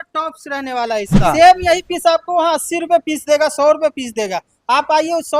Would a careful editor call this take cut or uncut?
cut